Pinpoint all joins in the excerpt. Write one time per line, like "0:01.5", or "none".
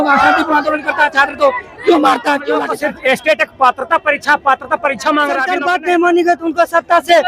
0:02.7
0:05.5